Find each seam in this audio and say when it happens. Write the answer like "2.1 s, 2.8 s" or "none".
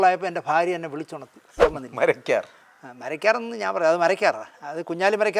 1.6 s